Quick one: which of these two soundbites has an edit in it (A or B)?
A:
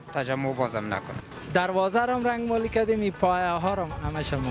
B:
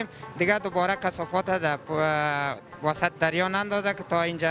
A